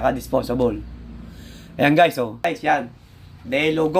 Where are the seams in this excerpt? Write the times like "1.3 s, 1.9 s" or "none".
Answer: 2.4 s